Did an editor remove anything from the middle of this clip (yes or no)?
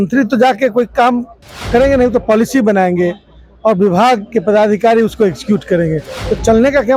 no